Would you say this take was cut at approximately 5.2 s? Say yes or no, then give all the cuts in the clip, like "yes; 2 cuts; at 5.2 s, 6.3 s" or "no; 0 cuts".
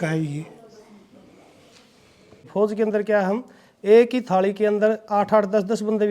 no; 1 cut; at 2.5 s